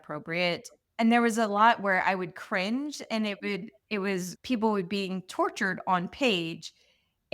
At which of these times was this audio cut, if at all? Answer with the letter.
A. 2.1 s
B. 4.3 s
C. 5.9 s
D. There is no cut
B